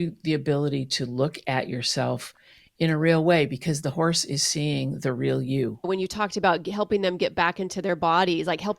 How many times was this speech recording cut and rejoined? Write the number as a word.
one